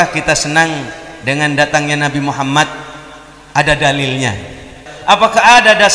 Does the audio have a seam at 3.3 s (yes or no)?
no